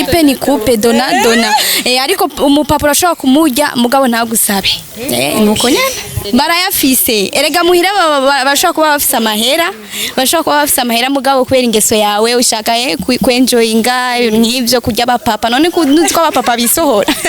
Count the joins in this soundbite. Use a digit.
1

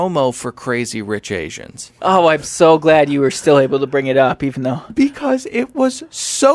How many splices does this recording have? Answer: 1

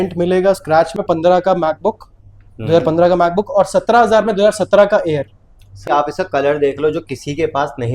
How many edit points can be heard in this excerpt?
2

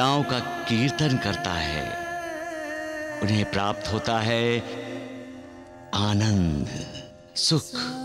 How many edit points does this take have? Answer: 0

